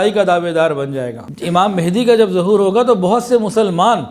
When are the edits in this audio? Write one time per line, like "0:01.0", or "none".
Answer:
0:01.1